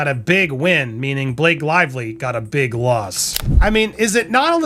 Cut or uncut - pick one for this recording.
cut